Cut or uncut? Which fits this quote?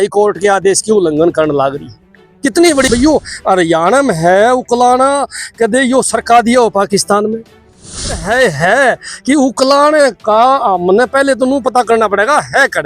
cut